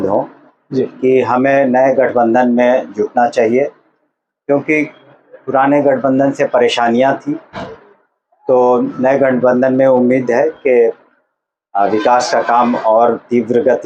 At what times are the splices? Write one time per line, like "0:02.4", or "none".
none